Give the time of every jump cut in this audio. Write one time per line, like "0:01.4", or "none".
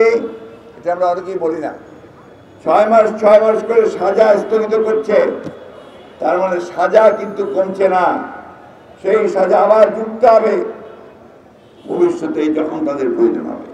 none